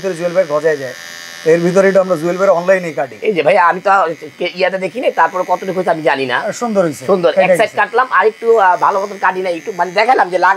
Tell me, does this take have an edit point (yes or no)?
no